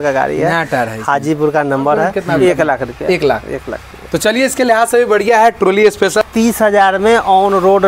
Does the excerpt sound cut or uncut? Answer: cut